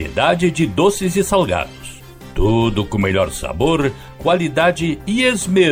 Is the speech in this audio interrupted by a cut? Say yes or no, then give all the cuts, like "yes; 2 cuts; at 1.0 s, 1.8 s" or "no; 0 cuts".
no; 0 cuts